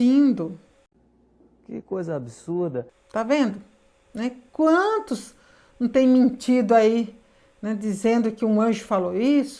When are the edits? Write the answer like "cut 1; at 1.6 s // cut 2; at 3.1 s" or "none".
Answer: none